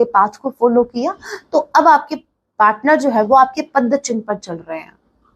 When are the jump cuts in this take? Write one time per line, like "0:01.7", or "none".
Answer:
none

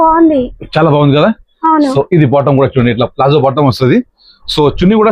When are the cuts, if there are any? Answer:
none

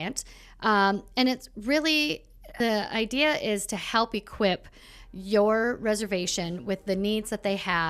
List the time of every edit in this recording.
0:02.4

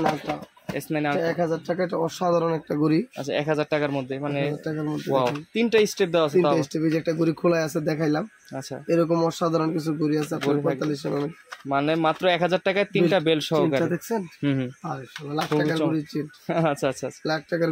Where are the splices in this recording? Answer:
none

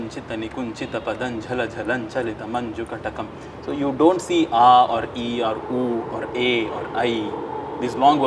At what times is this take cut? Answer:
none

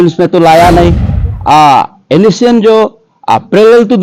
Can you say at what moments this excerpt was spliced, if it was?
0:01.2

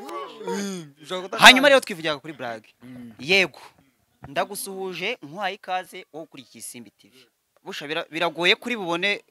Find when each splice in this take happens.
0:07.6

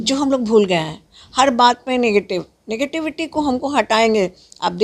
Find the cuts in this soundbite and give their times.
none

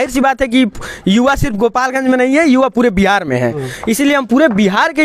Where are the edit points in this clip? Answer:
none

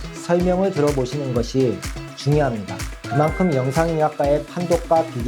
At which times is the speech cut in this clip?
0:03.0

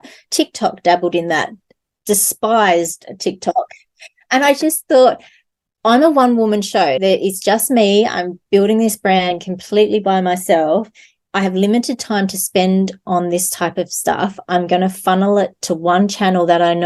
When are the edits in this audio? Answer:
none

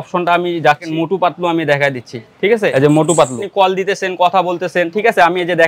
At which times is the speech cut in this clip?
0:00.9
0:02.7
0:03.4

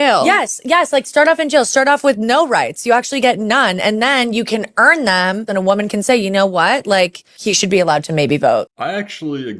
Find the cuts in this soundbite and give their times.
0:08.7

